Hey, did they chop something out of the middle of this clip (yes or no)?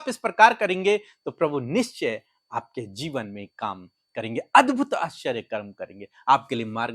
no